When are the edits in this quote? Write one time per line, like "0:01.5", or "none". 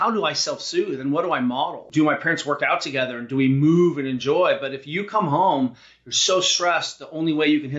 0:01.9